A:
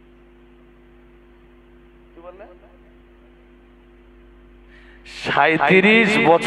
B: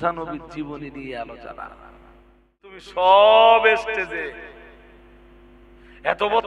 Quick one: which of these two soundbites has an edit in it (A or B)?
B